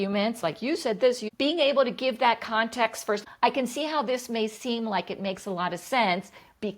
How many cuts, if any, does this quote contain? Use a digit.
1